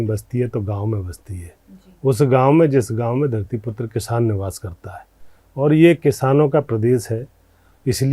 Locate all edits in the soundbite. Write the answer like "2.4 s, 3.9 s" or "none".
none